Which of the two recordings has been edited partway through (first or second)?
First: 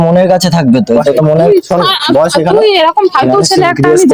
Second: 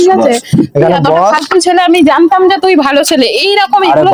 first